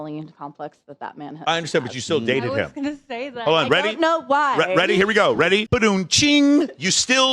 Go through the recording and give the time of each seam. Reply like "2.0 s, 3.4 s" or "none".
5.6 s